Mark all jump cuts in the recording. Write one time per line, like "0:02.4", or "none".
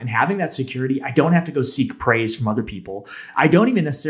0:03.2